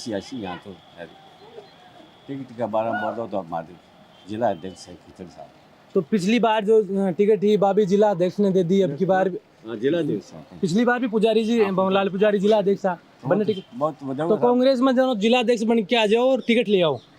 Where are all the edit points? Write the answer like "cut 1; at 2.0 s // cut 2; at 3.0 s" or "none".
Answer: none